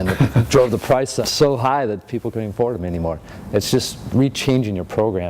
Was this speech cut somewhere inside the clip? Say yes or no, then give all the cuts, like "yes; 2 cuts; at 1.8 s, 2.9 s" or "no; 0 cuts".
yes; 2 cuts; at 1.2 s, 3.3 s